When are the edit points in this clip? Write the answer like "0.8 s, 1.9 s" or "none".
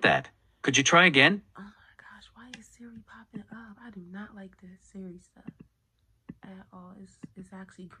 none